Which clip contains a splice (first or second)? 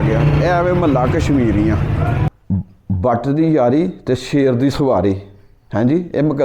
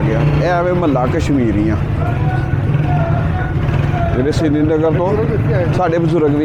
first